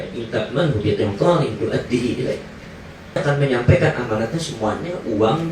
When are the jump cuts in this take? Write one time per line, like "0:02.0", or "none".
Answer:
0:03.2